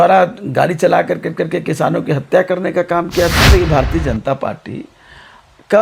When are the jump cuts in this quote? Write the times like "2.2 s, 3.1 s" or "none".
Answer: 3.5 s